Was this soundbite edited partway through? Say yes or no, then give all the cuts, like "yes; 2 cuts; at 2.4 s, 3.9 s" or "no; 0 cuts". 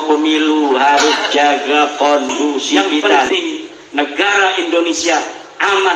yes; 1 cut; at 3.3 s